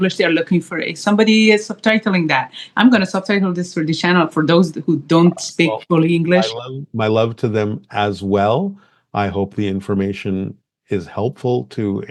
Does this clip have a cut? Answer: no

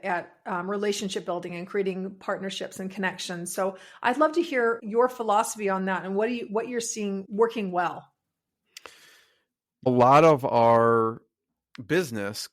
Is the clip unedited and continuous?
no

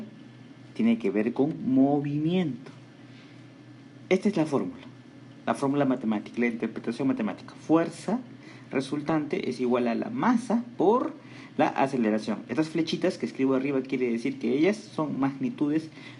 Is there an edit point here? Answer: no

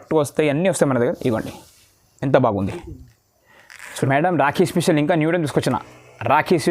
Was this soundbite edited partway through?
yes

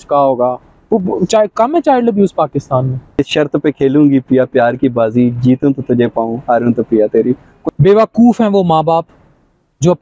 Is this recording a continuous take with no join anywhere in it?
no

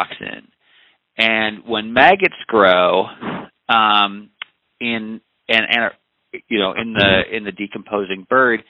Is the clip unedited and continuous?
yes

